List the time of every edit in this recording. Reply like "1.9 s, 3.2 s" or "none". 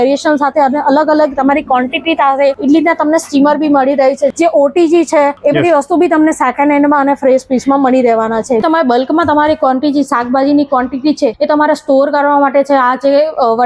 2.6 s, 4.3 s, 5.4 s, 8.6 s, 11.4 s